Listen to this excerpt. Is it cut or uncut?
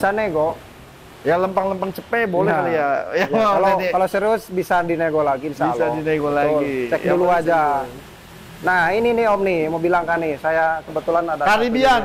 uncut